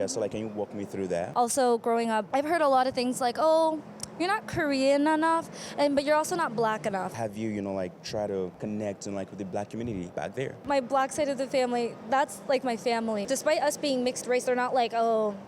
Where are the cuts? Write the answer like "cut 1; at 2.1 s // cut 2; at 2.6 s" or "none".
cut 1; at 1.3 s // cut 2; at 7.1 s // cut 3; at 8.5 s // cut 4; at 10.4 s // cut 5; at 13.2 s